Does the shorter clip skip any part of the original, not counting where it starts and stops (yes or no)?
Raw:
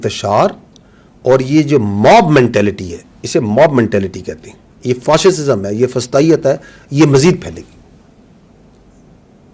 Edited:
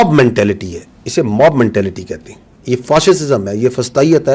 no